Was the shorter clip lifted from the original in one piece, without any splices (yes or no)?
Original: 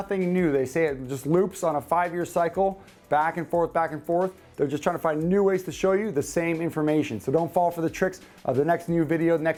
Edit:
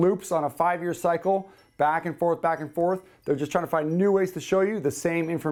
yes